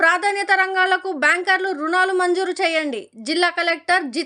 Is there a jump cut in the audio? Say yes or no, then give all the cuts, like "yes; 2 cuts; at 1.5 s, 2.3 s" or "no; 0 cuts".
no; 0 cuts